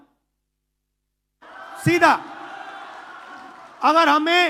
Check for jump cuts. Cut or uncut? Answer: uncut